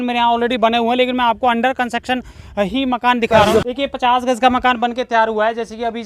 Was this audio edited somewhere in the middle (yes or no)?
yes